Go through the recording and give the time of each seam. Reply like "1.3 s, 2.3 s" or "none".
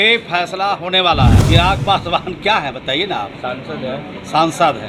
1.4 s